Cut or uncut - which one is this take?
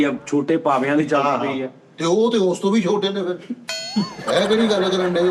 uncut